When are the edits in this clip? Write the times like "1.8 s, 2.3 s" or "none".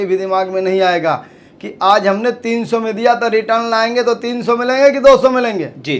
none